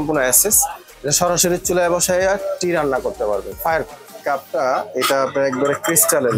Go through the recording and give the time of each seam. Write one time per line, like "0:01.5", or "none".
0:04.2